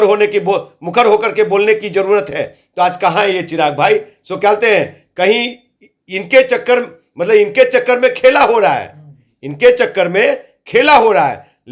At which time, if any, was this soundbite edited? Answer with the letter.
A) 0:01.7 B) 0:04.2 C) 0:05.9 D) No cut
D